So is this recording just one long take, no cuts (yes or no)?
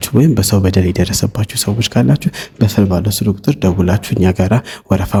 yes